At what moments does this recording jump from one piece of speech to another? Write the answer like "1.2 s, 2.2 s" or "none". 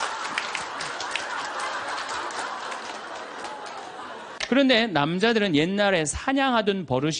4.2 s